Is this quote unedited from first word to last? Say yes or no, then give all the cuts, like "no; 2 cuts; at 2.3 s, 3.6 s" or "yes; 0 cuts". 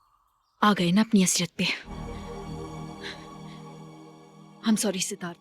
no; 1 cut; at 1.9 s